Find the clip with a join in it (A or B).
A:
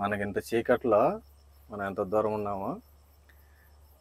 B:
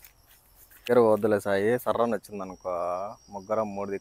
B